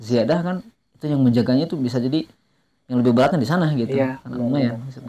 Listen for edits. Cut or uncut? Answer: uncut